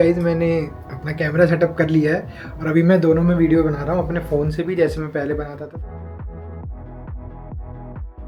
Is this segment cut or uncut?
uncut